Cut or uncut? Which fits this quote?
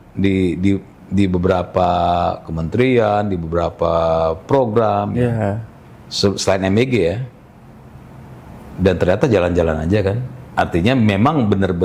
uncut